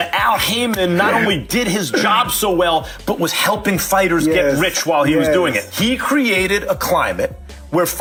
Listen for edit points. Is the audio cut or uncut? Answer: uncut